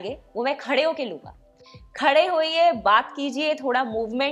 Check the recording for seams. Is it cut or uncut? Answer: uncut